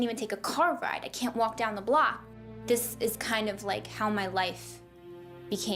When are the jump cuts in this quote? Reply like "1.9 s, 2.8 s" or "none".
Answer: 2.4 s

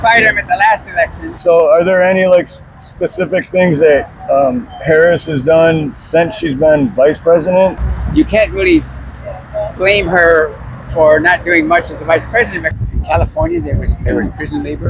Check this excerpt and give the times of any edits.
1.3 s, 7.9 s, 12.6 s

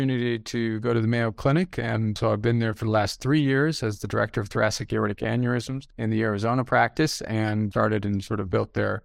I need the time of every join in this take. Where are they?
none

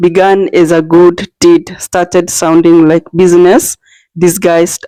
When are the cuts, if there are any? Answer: none

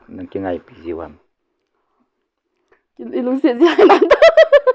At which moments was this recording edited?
none

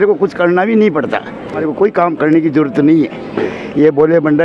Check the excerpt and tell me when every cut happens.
1.6 s

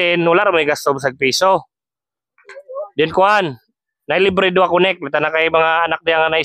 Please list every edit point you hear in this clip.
none

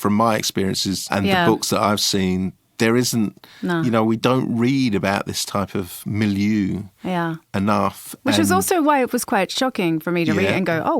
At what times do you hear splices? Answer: 1.1 s

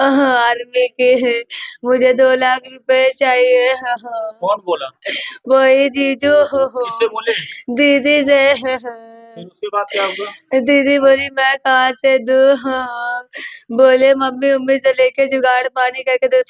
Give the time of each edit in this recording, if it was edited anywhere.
none

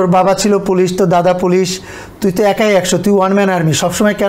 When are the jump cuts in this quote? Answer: none

